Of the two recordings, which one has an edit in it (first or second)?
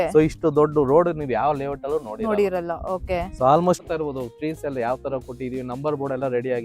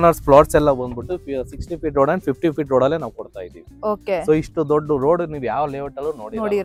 first